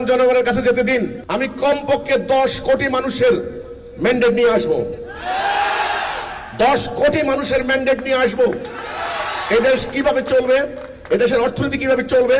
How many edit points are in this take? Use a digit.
1